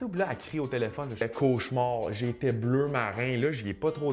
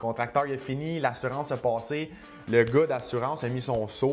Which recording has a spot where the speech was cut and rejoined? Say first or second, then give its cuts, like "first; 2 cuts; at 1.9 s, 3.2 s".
first; 1 cut; at 1.2 s